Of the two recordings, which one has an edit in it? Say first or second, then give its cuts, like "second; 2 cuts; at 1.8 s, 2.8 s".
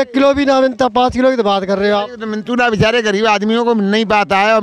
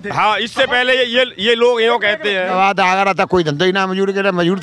second; 1 cut; at 2.5 s